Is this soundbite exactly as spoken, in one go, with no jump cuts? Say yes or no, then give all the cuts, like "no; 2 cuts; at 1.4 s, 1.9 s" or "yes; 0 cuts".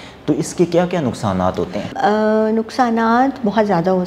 yes; 0 cuts